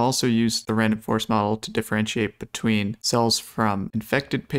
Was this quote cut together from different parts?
no; 0 cuts

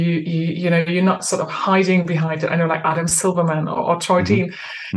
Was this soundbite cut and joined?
no; 0 cuts

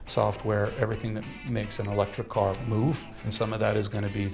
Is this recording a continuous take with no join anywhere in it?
no; 1 cut; at 3.2 s

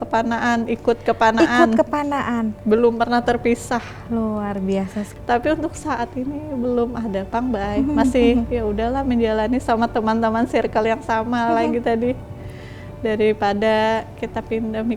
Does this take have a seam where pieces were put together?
yes; 1 cut; at 5.1 s

